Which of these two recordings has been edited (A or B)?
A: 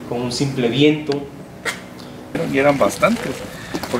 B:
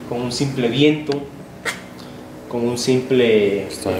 A